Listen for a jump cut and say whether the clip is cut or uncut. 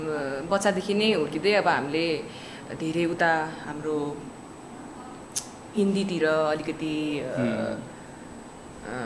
uncut